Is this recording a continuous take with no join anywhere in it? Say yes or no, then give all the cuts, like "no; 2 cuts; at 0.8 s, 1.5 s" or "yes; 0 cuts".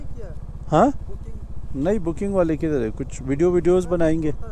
yes; 0 cuts